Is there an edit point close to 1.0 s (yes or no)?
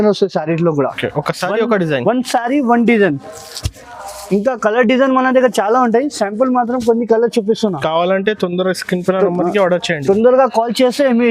yes